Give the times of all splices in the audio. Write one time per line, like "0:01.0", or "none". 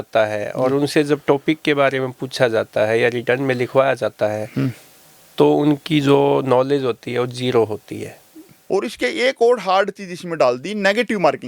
0:08.5